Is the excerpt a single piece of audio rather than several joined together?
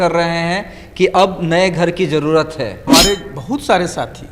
no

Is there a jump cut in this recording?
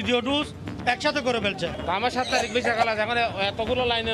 yes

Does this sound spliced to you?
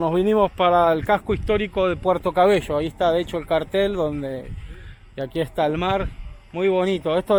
no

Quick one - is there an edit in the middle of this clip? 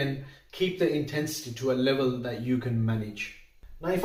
no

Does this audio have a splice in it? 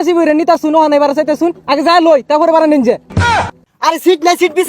yes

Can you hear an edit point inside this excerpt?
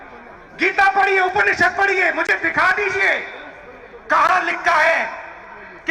no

